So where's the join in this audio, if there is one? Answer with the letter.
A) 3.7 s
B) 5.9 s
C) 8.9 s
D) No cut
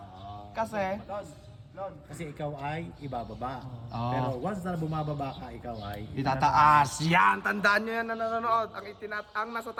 D